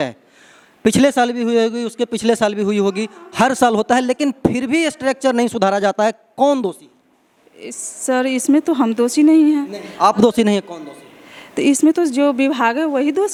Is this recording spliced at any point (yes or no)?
no